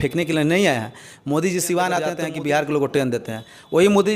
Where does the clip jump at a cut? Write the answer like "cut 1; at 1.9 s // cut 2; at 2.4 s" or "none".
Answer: cut 1; at 2.2 s